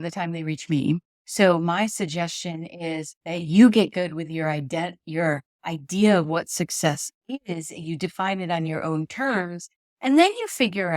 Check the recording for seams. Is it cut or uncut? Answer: cut